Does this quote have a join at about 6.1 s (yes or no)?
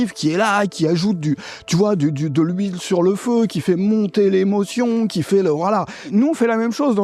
yes